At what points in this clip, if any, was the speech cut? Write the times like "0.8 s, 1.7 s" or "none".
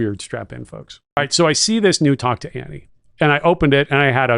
1.2 s